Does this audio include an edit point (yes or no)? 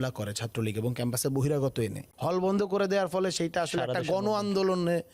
yes